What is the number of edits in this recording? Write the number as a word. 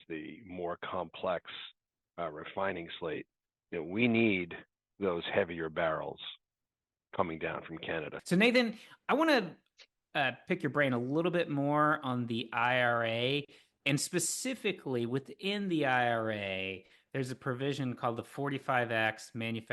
one